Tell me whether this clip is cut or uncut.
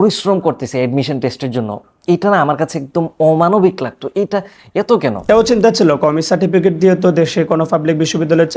cut